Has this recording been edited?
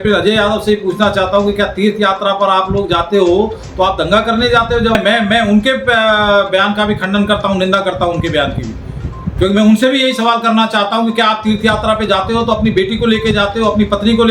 yes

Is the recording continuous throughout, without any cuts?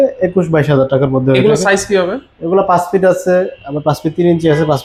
yes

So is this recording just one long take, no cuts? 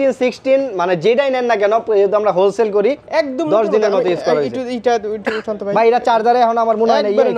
no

